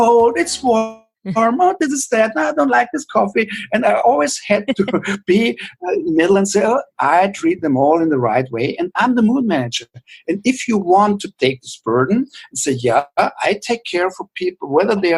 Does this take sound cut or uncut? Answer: uncut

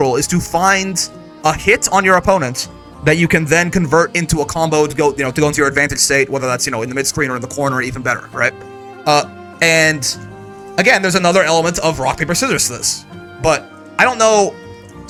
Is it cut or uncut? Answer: uncut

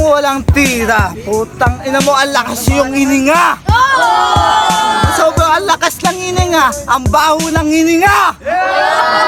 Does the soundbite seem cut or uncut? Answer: uncut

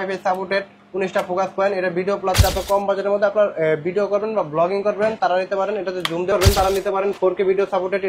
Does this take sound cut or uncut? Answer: cut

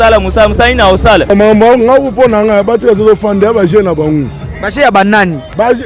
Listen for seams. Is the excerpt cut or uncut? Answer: cut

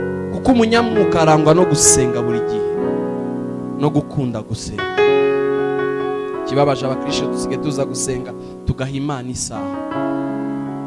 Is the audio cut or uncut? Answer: uncut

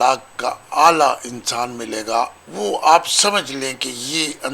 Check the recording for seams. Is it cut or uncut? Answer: cut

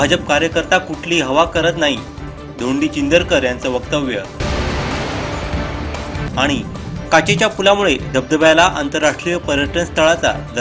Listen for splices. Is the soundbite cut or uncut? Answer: uncut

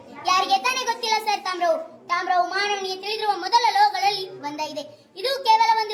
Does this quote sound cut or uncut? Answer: uncut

